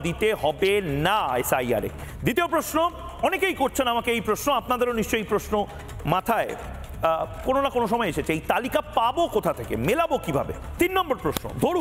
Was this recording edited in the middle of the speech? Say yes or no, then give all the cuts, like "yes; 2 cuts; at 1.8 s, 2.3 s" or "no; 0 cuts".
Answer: yes; 2 cuts; at 2.0 s, 10.8 s